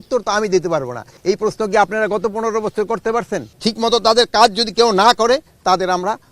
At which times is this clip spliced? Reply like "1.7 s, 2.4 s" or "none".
1.1 s, 3.5 s